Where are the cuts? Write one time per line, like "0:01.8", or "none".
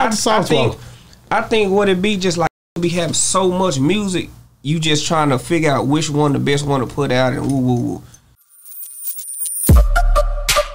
0:08.4